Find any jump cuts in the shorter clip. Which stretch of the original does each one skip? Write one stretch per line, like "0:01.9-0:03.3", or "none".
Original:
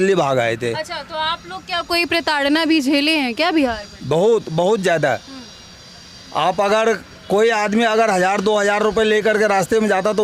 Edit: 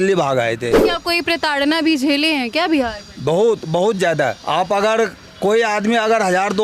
0:00.8-0:01.6
0:05.2-0:06.3